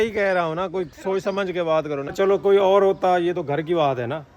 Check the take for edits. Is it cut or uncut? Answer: cut